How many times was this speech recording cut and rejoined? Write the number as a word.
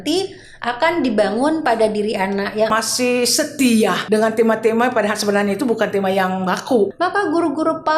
two